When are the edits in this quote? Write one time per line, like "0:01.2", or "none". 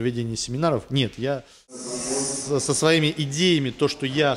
0:01.9